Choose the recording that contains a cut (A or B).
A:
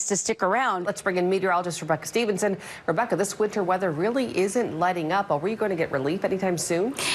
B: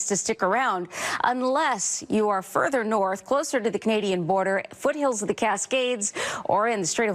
A